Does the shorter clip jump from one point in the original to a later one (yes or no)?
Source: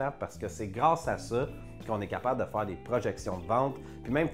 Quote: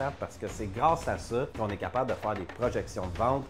yes